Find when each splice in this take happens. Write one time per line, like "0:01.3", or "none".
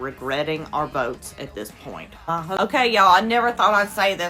0:02.6